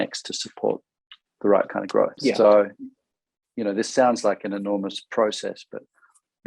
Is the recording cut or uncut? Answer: cut